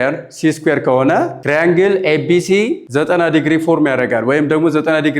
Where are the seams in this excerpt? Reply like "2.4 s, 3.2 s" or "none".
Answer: 1.4 s, 2.8 s